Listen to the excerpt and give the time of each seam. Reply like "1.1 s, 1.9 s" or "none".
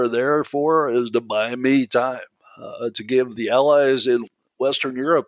3.3 s, 4.2 s